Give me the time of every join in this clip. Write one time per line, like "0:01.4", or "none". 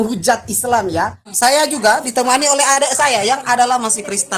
0:01.2